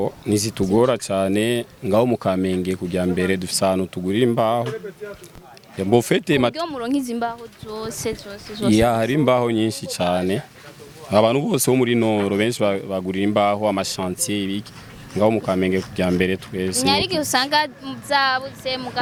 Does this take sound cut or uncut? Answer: uncut